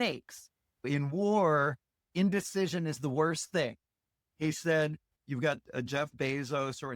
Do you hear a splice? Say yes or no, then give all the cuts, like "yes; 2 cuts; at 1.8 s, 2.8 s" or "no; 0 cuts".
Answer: yes; 3 cuts; at 0.9 s, 2.1 s, 5.1 s